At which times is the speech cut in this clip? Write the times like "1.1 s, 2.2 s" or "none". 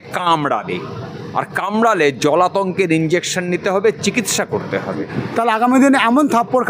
5.2 s